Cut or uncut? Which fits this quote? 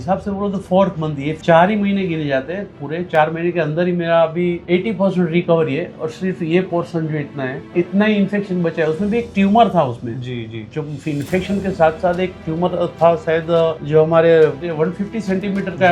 cut